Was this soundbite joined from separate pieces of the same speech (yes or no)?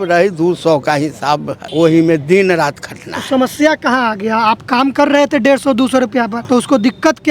yes